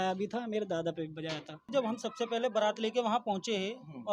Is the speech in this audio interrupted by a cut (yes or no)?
yes